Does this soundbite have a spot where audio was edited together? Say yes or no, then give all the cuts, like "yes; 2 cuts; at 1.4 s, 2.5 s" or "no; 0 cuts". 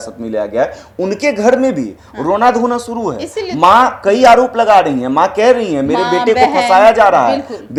no; 0 cuts